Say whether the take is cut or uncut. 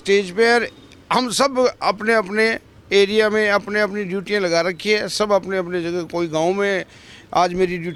uncut